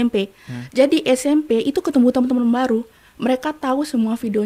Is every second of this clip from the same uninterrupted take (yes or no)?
yes